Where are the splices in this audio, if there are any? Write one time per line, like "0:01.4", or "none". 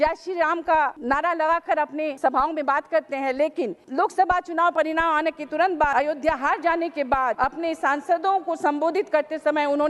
0:01.0
0:02.1
0:03.8
0:05.9
0:07.3